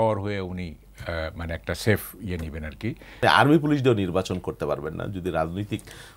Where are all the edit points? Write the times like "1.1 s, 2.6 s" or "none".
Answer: 3.2 s